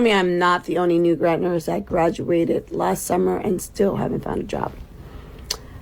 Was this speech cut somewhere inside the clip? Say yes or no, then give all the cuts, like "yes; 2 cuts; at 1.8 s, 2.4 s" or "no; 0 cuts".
no; 0 cuts